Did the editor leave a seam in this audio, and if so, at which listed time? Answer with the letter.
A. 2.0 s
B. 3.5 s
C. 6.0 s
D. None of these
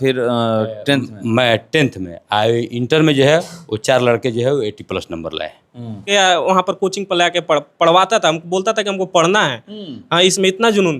C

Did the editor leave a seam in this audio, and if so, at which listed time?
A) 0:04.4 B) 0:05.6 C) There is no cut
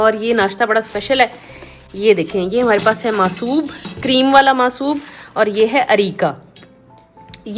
C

